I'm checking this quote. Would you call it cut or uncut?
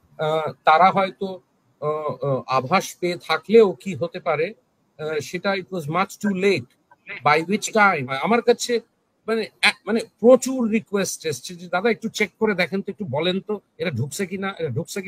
cut